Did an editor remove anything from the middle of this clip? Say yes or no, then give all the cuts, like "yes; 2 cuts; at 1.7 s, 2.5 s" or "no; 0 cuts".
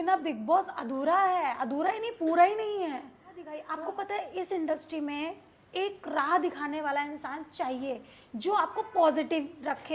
yes; 1 cut; at 3.6 s